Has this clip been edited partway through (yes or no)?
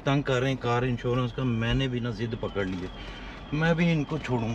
no